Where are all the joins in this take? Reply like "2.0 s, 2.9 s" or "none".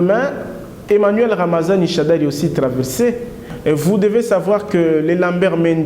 3.4 s